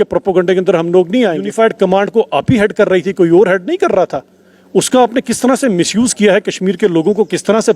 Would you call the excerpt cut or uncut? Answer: cut